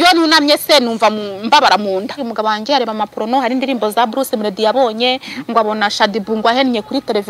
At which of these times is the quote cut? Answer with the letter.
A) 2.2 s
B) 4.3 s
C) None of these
A